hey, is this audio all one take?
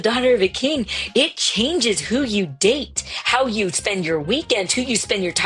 yes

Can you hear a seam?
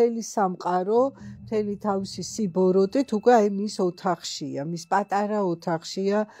no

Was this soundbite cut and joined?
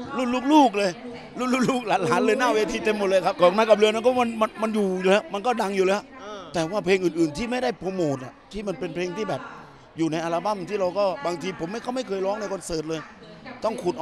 yes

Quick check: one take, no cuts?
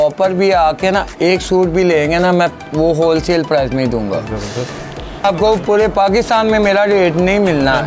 no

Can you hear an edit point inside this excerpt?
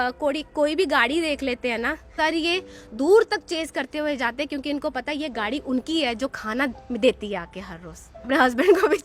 yes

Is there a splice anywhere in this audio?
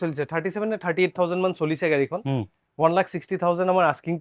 no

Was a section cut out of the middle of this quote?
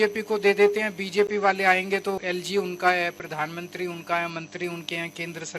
yes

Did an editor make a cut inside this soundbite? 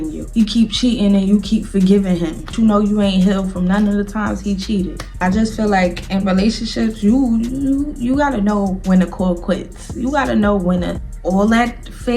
yes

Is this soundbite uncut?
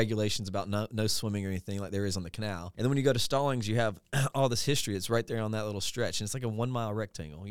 no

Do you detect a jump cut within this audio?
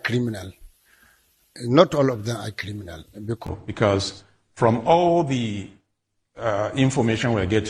yes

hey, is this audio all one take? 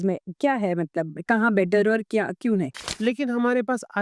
no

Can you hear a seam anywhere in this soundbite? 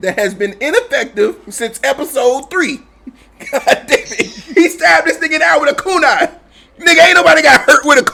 no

